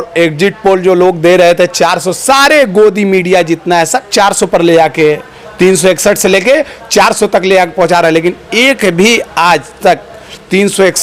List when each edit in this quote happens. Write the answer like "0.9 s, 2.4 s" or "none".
none